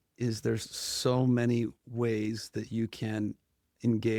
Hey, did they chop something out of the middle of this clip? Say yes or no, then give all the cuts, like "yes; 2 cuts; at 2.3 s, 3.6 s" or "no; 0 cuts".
no; 0 cuts